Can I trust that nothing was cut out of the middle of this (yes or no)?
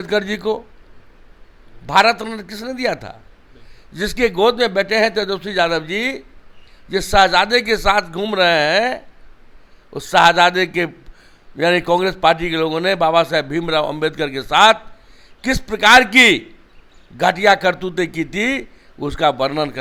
yes